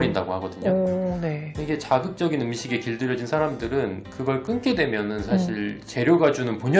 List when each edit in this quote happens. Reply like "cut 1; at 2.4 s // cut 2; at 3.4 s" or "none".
none